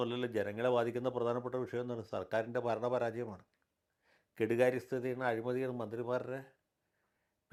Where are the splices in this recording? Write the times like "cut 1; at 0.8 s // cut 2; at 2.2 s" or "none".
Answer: none